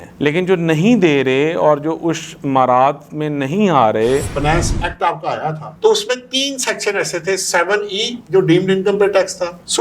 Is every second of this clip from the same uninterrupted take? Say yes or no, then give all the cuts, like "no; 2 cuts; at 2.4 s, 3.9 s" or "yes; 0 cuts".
no; 1 cut; at 4.3 s